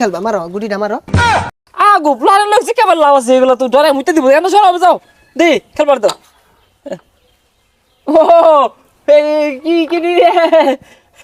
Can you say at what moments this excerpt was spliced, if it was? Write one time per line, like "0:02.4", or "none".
0:01.3